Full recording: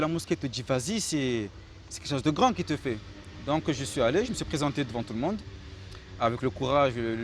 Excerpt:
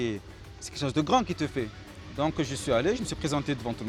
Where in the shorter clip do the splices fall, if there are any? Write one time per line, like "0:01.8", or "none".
none